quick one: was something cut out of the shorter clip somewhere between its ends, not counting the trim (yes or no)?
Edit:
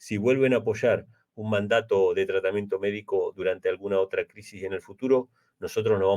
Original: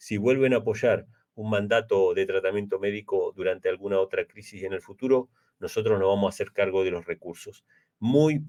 no